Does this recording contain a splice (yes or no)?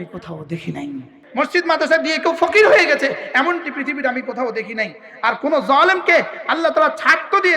yes